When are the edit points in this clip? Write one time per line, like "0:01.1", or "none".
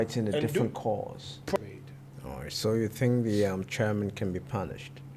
0:01.6

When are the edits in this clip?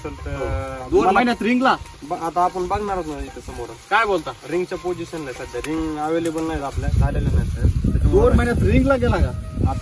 none

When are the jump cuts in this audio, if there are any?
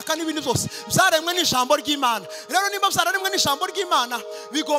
none

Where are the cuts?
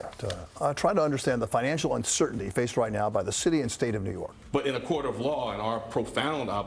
0:04.3

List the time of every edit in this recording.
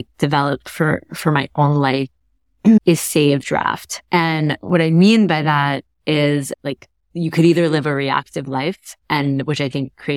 0:02.8
0:03.9
0:06.5
0:08.9

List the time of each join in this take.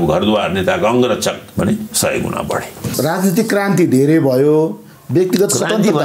0:01.4
0:02.9

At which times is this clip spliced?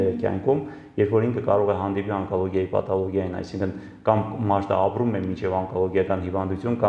none

